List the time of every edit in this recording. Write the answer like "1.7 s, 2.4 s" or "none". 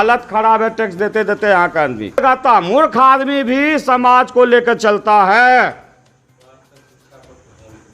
2.2 s